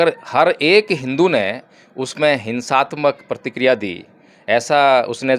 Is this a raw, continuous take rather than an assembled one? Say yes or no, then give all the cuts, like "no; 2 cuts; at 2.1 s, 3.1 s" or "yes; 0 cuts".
yes; 0 cuts